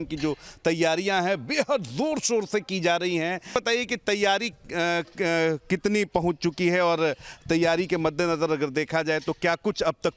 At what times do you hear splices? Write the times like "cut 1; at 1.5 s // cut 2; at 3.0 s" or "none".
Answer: cut 1; at 3.5 s